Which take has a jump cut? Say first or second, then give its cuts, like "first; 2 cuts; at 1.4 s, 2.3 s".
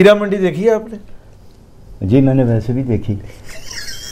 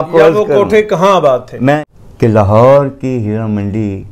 second; 1 cut; at 1.8 s